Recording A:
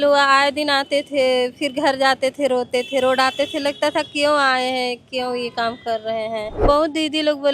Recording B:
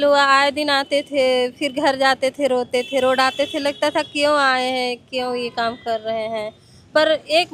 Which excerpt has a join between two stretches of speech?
A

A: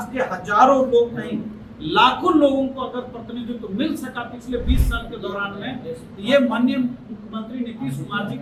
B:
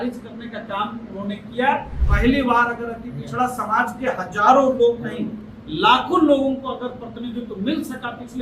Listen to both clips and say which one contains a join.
B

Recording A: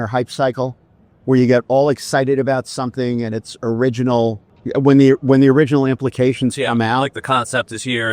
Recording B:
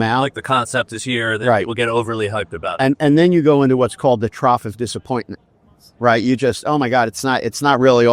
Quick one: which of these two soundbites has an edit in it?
A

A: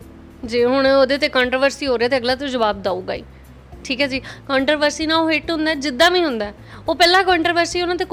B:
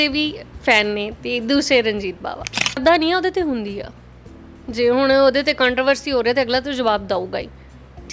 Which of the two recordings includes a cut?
B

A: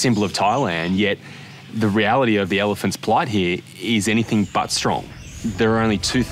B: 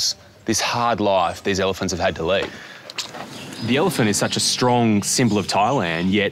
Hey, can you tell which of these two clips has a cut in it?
B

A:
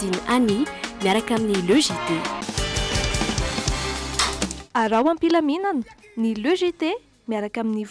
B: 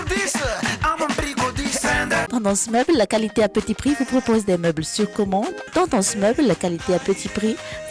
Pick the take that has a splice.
B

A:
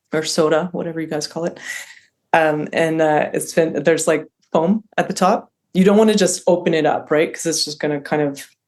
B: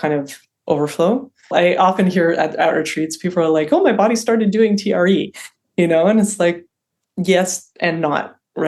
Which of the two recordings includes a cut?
B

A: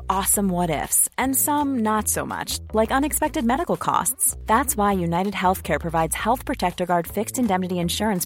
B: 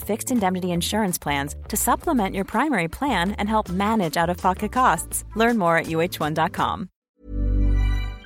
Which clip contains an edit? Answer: B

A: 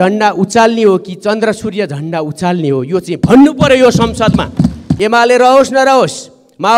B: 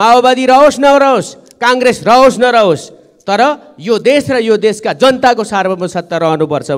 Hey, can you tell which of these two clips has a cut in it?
A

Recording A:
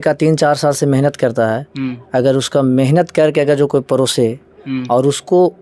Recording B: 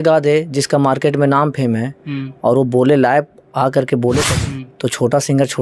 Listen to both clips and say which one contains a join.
B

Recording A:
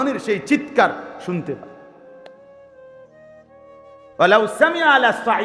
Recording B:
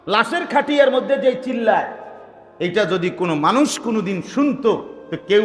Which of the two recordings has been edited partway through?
A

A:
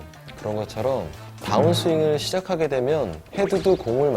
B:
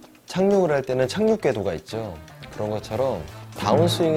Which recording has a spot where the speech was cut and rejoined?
A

